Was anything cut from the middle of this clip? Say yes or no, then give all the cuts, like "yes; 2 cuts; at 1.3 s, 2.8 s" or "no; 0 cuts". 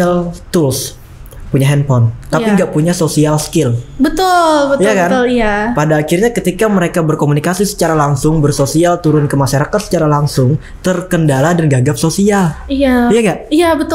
no; 0 cuts